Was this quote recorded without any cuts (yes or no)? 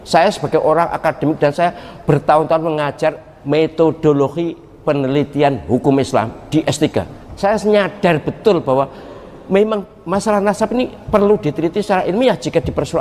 no